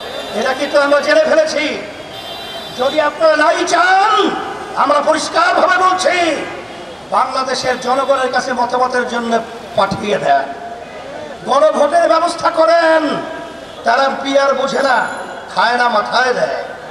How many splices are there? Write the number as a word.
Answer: one